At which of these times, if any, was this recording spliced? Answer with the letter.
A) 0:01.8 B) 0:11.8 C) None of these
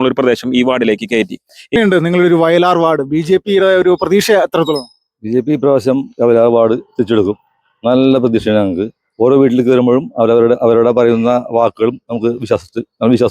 A